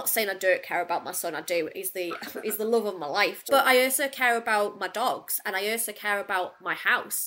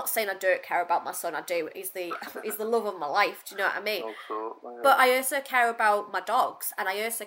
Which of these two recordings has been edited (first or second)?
first